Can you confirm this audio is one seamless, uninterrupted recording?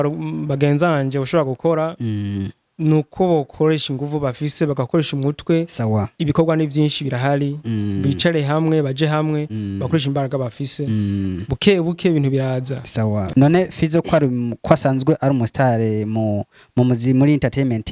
no; 1 cut; at 13.3 s

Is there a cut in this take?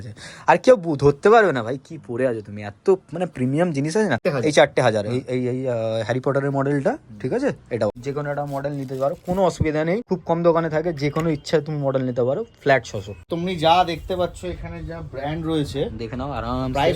yes; 4 cuts; at 4.2 s, 8.0 s, 10.1 s, 13.2 s

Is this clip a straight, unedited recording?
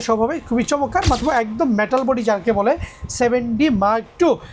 no; 1 cut; at 1.2 s

